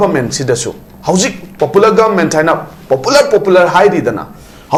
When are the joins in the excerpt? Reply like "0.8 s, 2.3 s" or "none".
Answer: none